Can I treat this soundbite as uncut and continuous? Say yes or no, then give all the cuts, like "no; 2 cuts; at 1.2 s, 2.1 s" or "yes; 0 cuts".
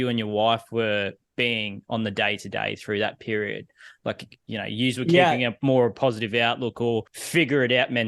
no; 2 cuts; at 4.3 s, 7.2 s